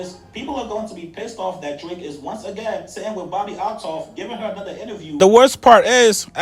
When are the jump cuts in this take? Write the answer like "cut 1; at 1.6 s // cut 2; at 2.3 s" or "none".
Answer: cut 1; at 5.1 s